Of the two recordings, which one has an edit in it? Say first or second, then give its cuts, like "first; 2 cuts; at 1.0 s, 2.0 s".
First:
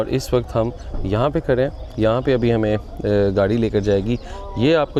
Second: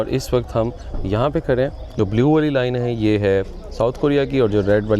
second; 1 cut; at 1.8 s